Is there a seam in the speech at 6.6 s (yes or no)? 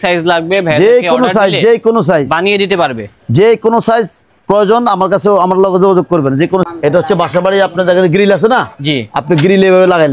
yes